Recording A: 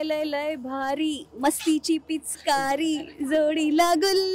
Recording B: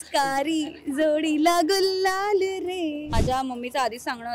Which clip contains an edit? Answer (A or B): B